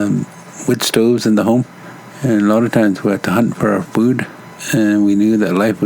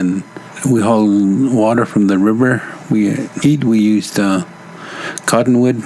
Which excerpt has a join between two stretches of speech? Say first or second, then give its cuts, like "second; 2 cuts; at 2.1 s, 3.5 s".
first; 1 cut; at 4.5 s